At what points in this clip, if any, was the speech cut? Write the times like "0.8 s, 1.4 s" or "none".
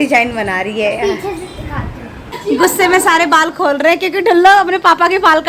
2.3 s